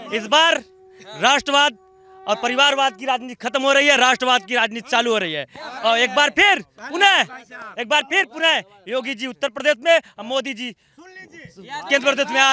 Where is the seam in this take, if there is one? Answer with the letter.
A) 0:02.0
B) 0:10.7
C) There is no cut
C